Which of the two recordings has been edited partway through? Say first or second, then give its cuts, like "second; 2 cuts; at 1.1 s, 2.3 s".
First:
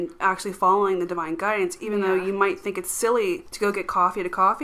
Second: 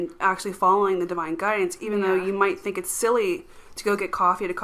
first; 1 cut; at 3.5 s